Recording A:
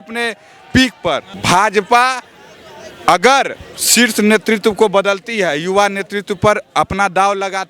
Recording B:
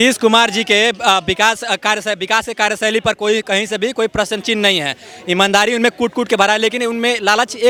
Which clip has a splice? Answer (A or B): A